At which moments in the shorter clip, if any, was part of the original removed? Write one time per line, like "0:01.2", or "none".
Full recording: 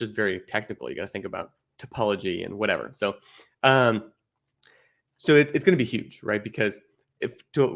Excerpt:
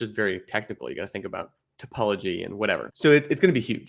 0:02.9